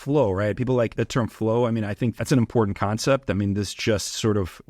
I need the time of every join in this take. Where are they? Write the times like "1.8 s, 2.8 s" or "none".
0.9 s, 2.2 s